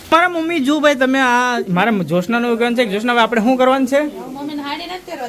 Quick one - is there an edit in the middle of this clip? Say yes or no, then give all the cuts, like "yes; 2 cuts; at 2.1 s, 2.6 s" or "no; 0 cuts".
no; 0 cuts